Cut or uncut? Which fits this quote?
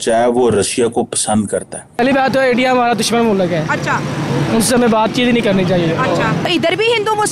cut